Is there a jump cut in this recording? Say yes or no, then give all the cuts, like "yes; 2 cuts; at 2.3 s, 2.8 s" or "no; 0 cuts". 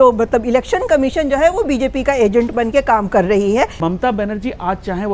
yes; 1 cut; at 3.8 s